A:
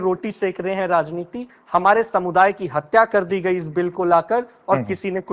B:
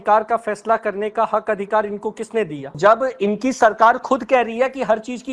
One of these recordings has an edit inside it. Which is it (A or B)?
B